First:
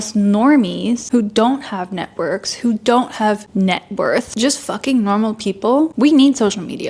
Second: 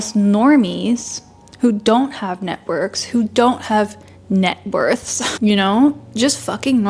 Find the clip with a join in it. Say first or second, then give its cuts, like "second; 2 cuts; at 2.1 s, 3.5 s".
first; 4 cuts; at 1.0 s, 3.5 s, 4.3 s, 5.9 s